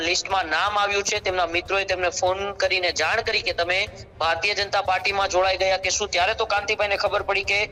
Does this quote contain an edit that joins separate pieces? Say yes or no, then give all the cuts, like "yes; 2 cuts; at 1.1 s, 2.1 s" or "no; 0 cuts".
no; 0 cuts